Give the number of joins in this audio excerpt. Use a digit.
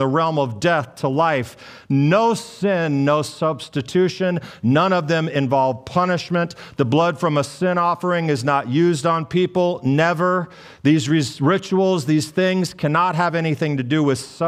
0